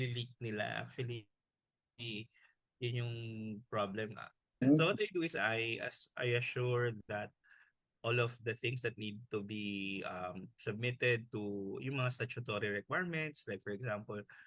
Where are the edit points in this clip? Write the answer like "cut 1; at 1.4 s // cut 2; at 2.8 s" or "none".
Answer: cut 1; at 4.6 s // cut 2; at 5.3 s

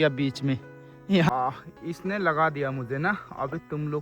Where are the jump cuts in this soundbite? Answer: cut 1; at 1.3 s

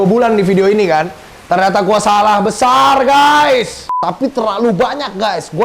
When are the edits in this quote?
cut 1; at 4.0 s

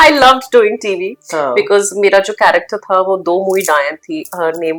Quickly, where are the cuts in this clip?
none

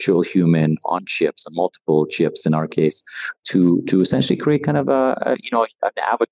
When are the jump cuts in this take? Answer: cut 1; at 3.3 s

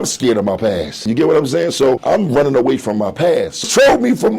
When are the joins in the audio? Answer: cut 1; at 0.9 s // cut 2; at 2.0 s // cut 3; at 3.6 s

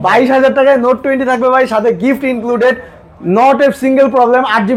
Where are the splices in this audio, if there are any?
none

